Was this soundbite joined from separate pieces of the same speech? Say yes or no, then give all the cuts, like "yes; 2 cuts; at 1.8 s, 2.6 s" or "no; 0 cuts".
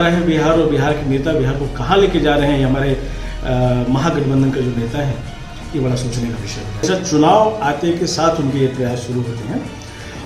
yes; 1 cut; at 6.8 s